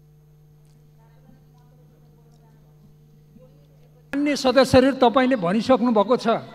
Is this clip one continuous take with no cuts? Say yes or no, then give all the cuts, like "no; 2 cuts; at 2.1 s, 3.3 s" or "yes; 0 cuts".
no; 1 cut; at 4.1 s